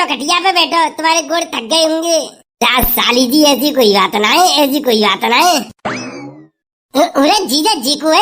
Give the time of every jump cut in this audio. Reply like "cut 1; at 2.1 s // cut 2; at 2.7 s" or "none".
none